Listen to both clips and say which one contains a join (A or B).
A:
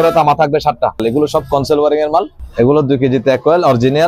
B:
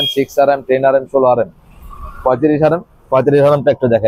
A